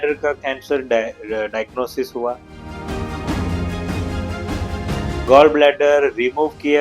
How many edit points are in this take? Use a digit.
1